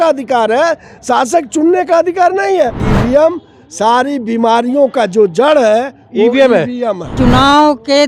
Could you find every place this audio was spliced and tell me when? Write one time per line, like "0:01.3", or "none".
0:02.9
0:07.1